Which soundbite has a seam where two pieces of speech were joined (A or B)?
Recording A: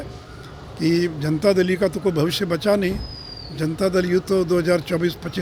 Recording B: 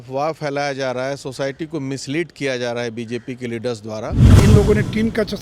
B